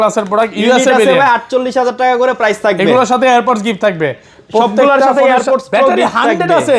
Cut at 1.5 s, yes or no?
no